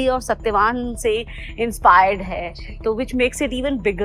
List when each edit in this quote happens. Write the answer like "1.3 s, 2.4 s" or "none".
none